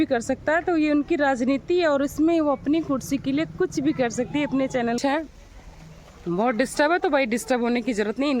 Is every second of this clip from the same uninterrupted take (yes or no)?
no